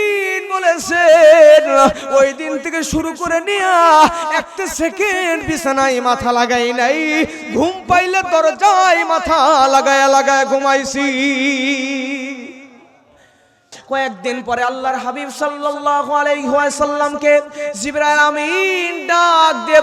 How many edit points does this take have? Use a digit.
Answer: 1